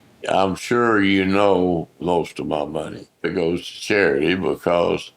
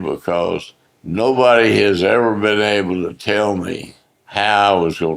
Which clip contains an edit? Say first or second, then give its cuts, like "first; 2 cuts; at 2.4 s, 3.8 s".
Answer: first; 2 cuts; at 2.0 s, 3.3 s